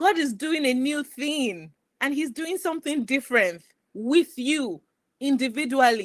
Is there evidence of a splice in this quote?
no; 0 cuts

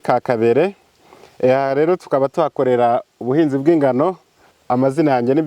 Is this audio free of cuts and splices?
no; 1 cut; at 4.6 s

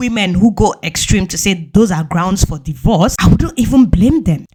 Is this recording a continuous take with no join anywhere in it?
yes; 0 cuts

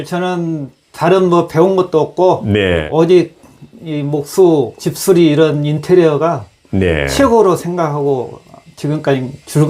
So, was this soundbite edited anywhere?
yes; 2 cuts; at 2.8 s, 4.8 s

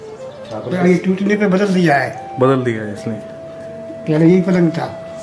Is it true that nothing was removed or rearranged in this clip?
yes; 0 cuts

